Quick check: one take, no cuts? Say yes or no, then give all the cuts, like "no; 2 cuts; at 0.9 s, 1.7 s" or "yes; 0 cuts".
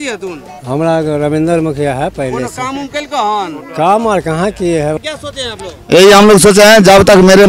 no; 1 cut; at 5.0 s